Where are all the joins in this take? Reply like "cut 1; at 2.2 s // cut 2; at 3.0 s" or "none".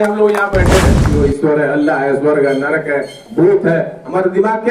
cut 1; at 1.2 s